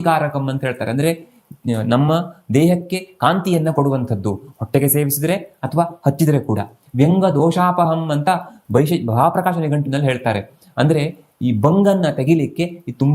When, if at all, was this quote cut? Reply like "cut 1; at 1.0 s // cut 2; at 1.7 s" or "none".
none